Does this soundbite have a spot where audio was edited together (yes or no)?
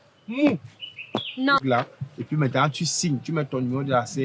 yes